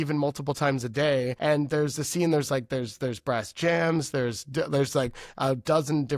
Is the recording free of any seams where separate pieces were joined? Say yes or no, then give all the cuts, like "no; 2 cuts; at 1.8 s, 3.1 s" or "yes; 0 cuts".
no; 1 cut; at 1.3 s